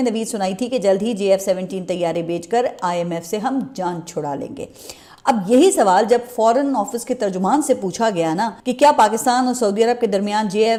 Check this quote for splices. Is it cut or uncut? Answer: uncut